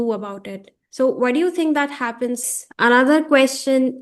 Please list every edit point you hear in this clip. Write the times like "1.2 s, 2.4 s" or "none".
2.5 s